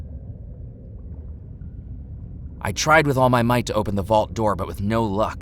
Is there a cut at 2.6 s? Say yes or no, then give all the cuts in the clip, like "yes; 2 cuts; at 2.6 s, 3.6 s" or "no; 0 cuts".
yes; 1 cut; at 2.6 s